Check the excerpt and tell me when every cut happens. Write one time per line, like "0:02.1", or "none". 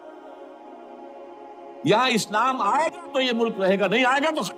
0:01.6